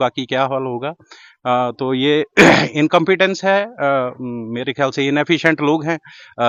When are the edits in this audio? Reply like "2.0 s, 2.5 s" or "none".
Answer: none